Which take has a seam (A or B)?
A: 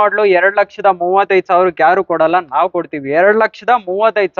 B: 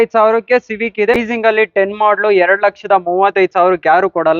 B